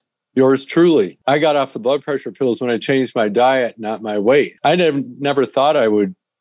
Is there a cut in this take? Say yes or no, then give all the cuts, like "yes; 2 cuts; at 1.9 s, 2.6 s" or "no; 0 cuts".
yes; 2 cuts; at 1.2 s, 4.5 s